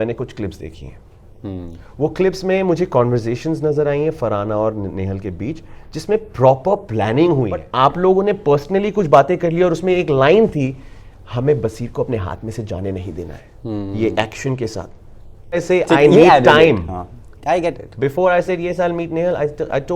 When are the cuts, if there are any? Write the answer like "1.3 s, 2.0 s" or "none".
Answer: 7.6 s, 15.6 s

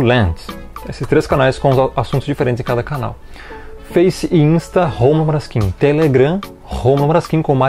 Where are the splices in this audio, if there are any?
none

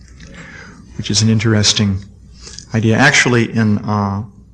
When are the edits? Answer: 3.1 s

